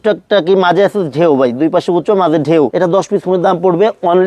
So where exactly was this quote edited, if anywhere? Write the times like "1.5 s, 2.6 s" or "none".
2.7 s